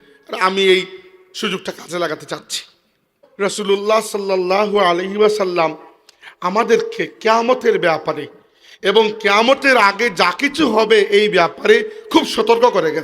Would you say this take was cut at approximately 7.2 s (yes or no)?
no